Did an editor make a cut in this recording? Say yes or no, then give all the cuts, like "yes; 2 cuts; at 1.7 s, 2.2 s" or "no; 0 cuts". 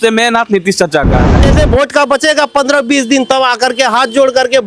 yes; 1 cut; at 1.3 s